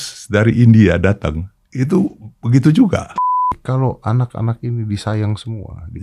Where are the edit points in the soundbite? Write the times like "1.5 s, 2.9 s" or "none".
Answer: 3.6 s